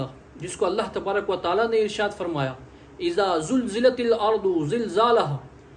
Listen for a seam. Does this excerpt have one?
no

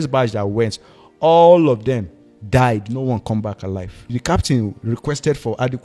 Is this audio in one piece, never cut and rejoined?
no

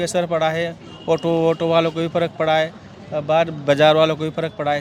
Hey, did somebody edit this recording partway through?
no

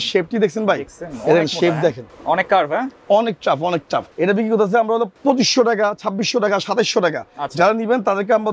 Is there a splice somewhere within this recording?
yes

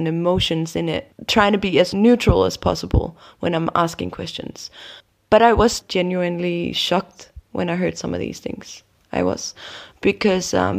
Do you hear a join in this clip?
yes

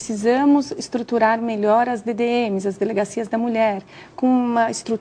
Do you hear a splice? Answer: no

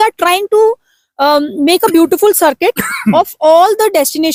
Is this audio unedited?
yes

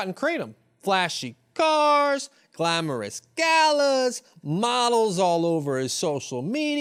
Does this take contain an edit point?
no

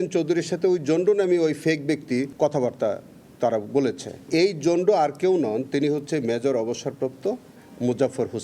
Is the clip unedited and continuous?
no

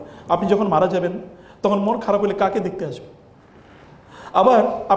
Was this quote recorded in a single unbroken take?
yes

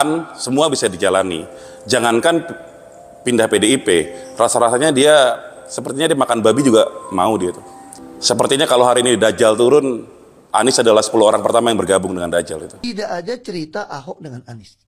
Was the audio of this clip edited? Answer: yes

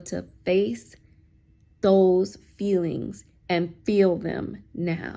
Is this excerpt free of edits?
yes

